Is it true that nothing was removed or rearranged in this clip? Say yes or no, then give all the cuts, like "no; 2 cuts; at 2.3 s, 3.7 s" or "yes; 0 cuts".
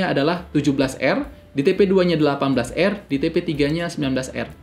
yes; 0 cuts